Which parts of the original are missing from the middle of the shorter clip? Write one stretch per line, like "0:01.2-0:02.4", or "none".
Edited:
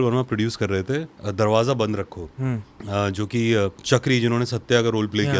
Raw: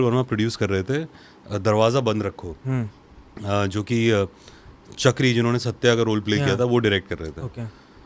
0:01.2-0:01.4
0:03.0-0:03.3
0:04.3-0:04.9